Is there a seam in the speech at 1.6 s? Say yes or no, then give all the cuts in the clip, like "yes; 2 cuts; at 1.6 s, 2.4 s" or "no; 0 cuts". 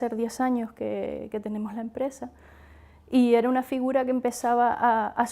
yes; 1 cut; at 1.6 s